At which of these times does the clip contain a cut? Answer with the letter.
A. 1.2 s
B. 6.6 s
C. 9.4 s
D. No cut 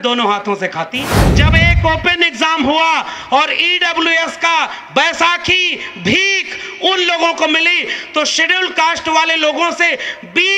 A